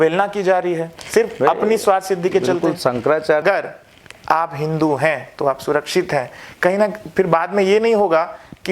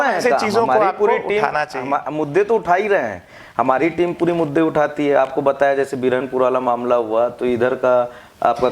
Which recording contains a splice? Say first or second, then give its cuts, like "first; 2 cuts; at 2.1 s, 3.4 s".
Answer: first; 1 cut; at 3.4 s